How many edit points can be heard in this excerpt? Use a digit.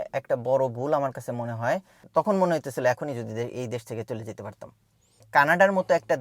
2